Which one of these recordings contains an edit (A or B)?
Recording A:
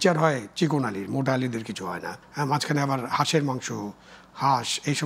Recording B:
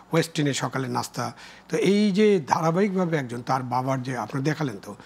A